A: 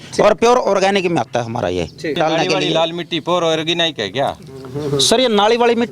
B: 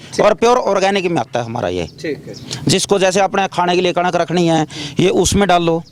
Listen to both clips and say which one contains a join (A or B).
A